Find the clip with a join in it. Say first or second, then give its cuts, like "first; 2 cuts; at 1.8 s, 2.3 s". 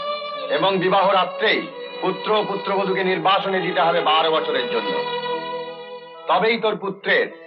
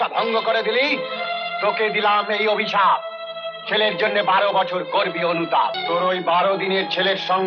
second; 2 cuts; at 1.1 s, 5.8 s